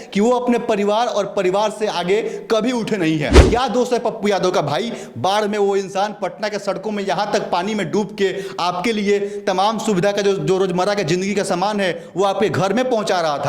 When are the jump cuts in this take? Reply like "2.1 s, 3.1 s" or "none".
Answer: 3.4 s